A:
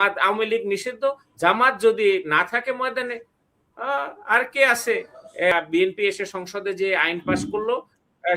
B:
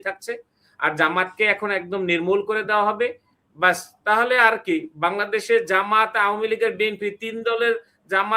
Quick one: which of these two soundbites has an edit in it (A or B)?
A